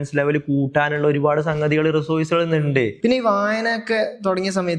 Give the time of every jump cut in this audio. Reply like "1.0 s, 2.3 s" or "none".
2.9 s